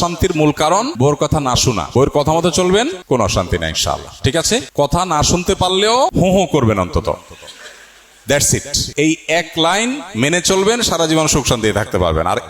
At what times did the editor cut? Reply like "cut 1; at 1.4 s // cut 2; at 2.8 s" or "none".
cut 1; at 0.9 s // cut 2; at 1.9 s // cut 3; at 3.0 s // cut 4; at 4.7 s // cut 5; at 6.1 s // cut 6; at 8.8 s